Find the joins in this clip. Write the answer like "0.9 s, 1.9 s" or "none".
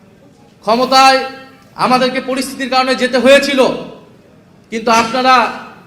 none